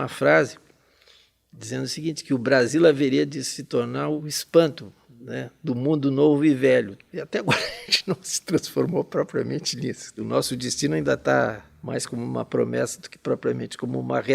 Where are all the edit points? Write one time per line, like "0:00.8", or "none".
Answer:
0:04.2
0:07.0
0:10.2
0:11.7